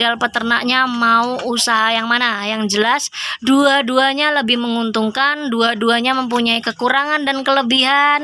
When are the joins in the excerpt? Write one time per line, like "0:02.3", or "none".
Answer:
none